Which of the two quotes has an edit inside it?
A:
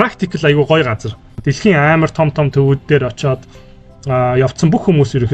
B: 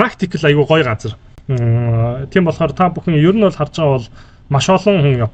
A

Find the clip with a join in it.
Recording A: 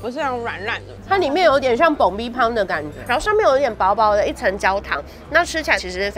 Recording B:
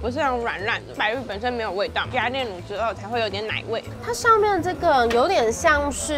A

